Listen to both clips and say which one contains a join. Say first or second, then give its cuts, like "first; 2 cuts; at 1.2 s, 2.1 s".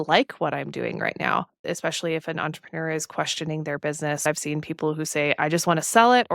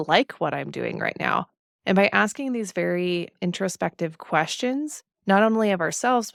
first; 2 cuts; at 1.7 s, 4.2 s